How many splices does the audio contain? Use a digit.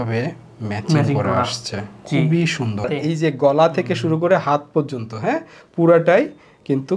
1